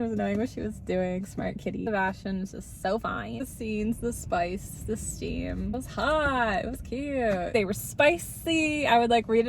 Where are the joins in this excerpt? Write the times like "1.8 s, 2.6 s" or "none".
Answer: 1.8 s, 3.4 s, 7.5 s